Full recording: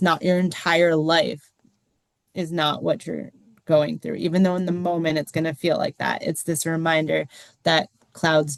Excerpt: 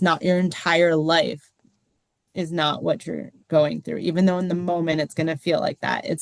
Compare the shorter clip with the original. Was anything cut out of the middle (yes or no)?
yes